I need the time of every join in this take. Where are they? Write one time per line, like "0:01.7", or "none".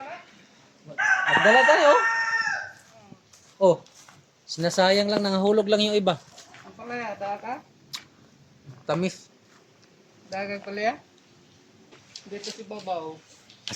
0:12.0